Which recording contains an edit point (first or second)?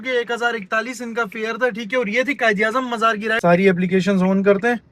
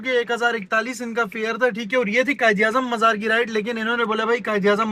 first